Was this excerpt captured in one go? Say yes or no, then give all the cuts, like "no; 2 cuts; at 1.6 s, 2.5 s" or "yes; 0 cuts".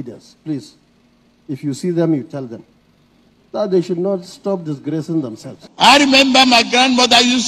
no; 1 cut; at 5.6 s